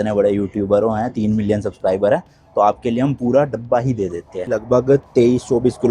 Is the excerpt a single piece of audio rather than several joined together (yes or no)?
no